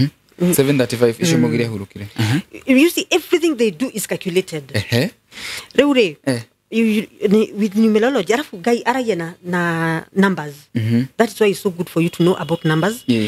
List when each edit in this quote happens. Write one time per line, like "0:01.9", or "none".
none